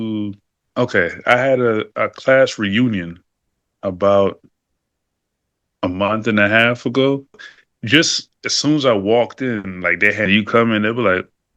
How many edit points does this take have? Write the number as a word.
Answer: two